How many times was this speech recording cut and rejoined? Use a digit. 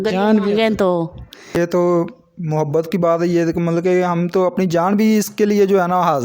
1